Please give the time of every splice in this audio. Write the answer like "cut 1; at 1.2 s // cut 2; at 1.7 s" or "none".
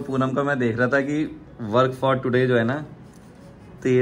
none